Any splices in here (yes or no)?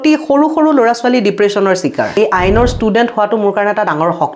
yes